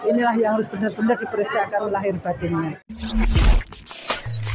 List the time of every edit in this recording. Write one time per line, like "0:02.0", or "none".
0:02.9